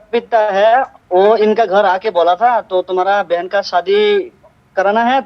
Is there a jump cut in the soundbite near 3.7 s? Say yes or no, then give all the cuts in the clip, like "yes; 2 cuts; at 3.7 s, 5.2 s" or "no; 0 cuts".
no; 1 cut; at 1.0 s